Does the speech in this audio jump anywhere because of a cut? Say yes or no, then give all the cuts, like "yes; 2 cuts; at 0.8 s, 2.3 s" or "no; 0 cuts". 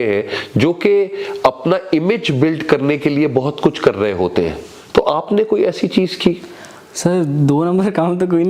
no; 0 cuts